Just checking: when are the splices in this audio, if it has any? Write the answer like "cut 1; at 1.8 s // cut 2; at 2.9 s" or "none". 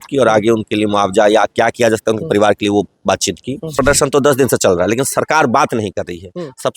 cut 1; at 3.7 s